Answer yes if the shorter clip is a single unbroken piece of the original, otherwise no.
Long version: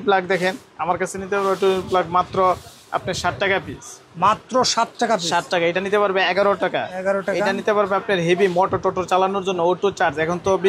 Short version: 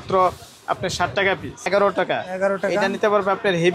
no